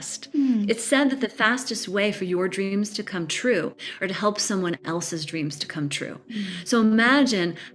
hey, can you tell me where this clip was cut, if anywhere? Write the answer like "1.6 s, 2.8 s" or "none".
none